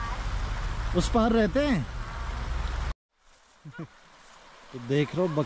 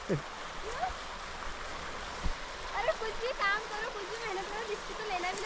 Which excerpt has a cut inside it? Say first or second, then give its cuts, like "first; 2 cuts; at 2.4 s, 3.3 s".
first; 1 cut; at 2.9 s